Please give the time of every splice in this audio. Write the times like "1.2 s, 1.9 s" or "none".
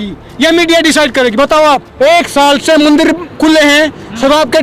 1.9 s